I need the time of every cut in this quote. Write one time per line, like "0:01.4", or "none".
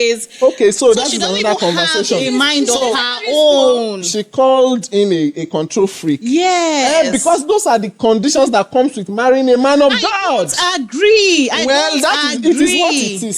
none